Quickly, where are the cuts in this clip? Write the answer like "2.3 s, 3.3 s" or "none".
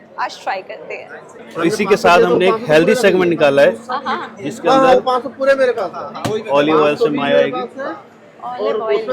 1.4 s